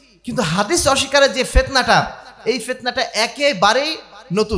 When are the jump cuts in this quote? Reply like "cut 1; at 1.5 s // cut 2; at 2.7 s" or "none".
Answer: none

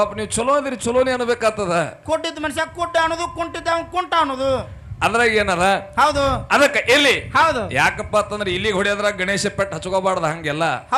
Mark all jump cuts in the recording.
none

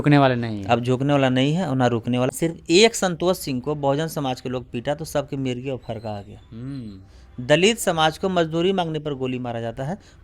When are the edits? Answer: cut 1; at 2.3 s

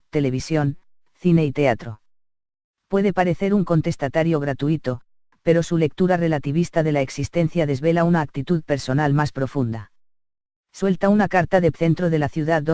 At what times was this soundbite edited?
none

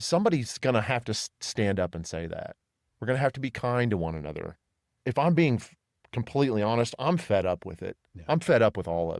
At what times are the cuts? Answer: cut 1; at 5.0 s

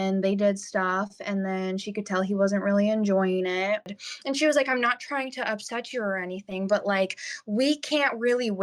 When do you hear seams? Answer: cut 1; at 4.0 s

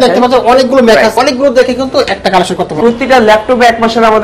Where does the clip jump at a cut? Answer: cut 1; at 1.2 s // cut 2; at 2.7 s

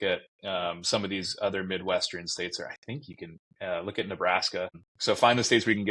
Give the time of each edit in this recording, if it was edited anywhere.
cut 1; at 4.9 s

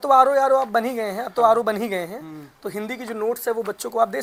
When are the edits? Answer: none

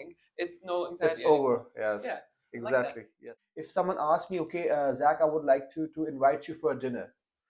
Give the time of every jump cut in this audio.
cut 1; at 3.2 s

